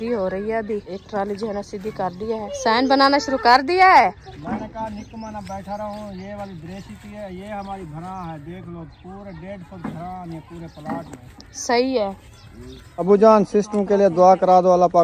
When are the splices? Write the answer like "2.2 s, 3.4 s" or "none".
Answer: 0.9 s, 2.5 s, 4.3 s, 13.0 s